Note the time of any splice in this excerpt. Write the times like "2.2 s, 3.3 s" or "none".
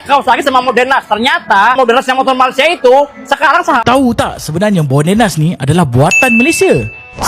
3.8 s